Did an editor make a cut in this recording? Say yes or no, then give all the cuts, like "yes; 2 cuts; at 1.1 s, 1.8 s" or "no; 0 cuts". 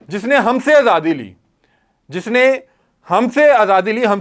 no; 0 cuts